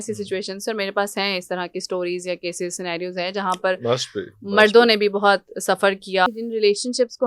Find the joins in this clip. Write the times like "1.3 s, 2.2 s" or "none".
6.3 s